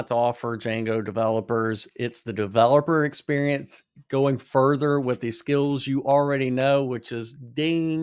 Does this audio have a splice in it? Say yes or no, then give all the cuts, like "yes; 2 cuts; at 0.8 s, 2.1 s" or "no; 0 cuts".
no; 0 cuts